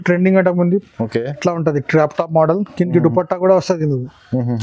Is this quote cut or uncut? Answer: uncut